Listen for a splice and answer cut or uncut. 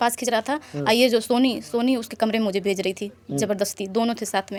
uncut